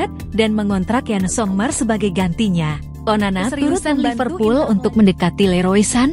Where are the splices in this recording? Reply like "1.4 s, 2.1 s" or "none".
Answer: 4.1 s